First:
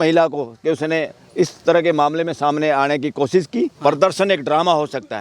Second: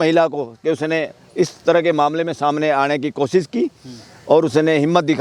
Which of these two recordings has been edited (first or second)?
first